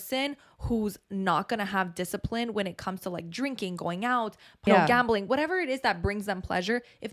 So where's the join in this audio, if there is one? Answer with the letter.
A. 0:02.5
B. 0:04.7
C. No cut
B